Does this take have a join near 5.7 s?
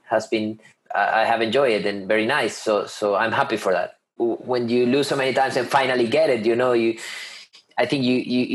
no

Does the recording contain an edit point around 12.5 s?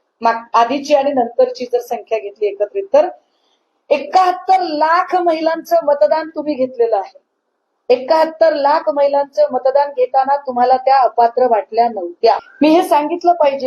yes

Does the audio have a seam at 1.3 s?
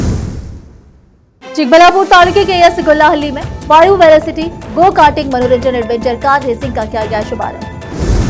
yes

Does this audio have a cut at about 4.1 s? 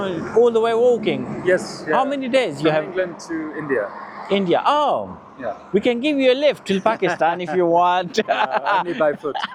no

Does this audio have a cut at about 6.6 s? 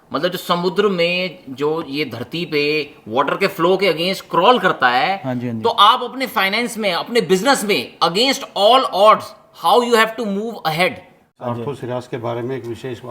no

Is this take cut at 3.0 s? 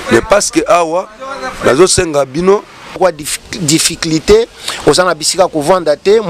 yes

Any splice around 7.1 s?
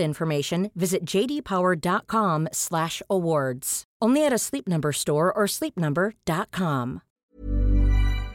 yes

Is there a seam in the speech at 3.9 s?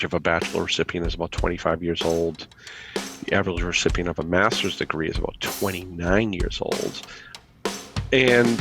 no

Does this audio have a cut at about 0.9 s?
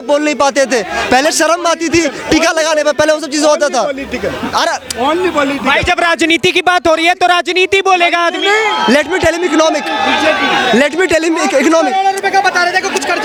no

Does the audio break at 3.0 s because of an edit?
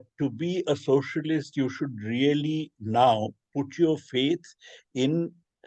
no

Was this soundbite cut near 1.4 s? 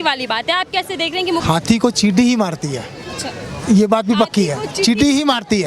yes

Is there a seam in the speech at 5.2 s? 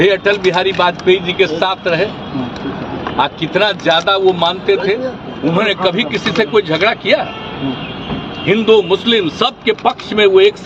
yes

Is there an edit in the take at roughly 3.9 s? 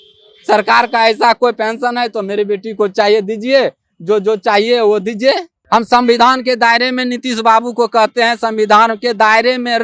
no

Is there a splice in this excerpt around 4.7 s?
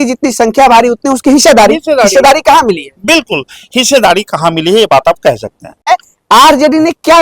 no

